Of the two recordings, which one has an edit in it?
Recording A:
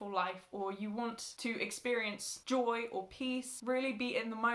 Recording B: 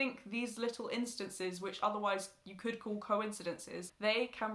A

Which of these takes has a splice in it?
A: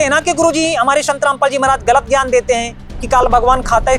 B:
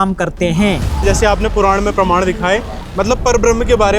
B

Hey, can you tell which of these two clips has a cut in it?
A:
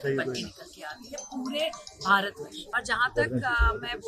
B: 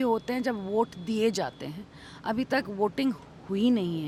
A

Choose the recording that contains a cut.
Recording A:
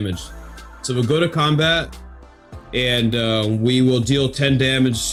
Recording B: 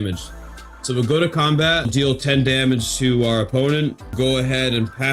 B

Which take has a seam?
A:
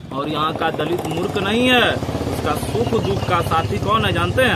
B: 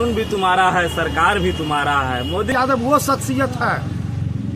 B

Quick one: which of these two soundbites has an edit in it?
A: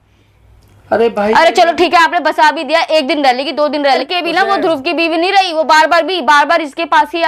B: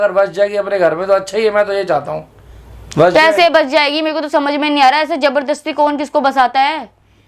A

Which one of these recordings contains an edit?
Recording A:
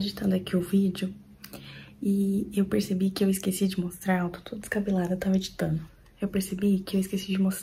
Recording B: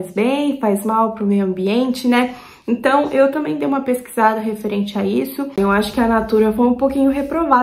B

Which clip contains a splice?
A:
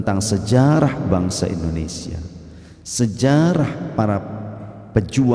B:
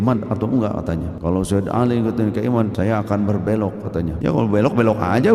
B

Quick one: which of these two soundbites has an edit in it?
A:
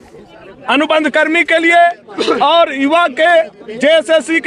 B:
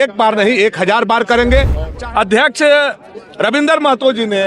B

